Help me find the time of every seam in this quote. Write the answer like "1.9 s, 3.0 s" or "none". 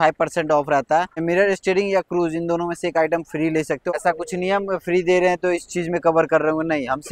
1.2 s, 3.9 s